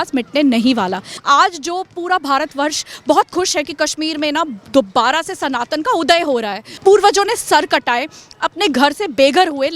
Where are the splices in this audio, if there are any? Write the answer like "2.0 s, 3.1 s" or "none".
1.1 s, 6.7 s